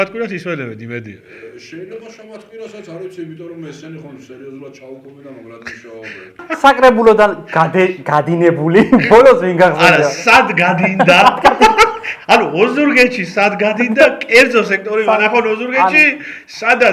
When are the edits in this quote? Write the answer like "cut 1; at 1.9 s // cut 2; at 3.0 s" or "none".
cut 1; at 6.4 s